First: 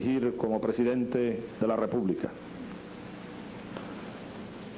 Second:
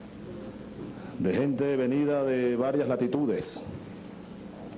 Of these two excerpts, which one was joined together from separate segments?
second; 1 cut; at 3.5 s

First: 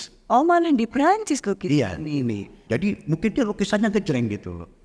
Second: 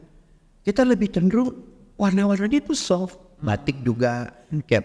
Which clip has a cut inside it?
first; 1 cut; at 2.5 s

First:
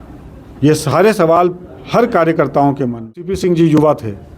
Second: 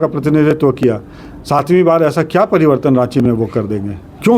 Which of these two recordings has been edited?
first; 1 cut; at 3.2 s

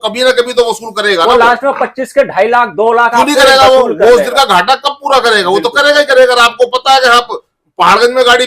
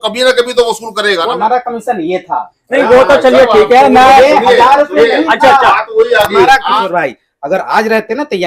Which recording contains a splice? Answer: second; 2 cuts; at 1.2 s, 6.8 s

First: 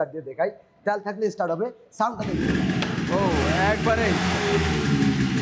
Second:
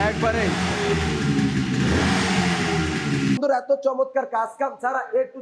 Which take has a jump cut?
second; 1 cut; at 3.4 s

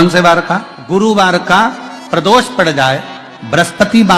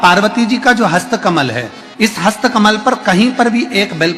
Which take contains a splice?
first; 1 cut; at 1.0 s

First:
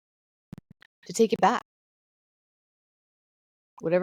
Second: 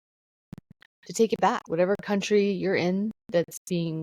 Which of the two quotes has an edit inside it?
second; 1 cut; at 1.6 s

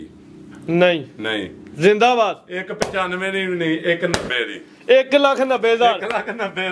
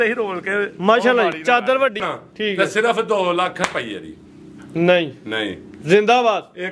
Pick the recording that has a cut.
second; 1 cut; at 2.0 s

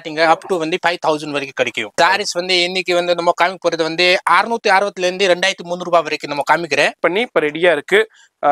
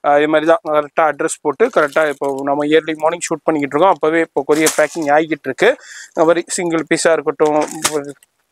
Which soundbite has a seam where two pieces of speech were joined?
first; 2 cuts; at 2.0 s, 7.0 s

